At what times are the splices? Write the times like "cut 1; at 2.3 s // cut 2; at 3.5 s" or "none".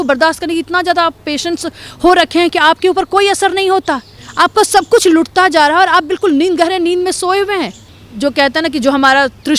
cut 1; at 7.8 s